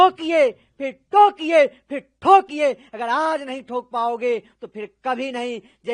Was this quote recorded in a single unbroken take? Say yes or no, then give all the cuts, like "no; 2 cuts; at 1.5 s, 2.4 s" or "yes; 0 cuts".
yes; 0 cuts